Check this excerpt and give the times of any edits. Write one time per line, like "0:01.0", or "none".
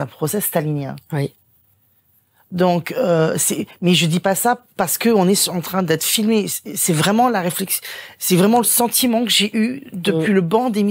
none